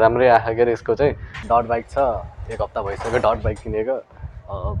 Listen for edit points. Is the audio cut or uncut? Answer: cut